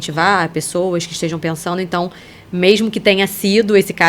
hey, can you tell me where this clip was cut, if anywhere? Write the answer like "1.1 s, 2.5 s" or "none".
none